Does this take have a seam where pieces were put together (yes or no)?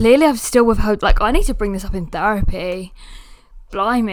no